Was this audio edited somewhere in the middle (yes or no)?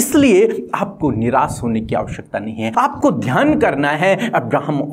no